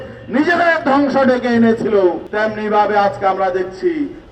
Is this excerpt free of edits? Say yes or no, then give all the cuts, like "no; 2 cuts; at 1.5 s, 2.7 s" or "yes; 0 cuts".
no; 1 cut; at 2.3 s